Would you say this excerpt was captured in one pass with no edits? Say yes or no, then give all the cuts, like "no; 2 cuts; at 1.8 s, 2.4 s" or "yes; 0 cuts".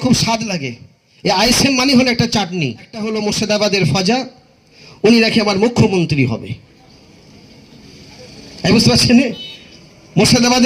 no; 1 cut; at 3.0 s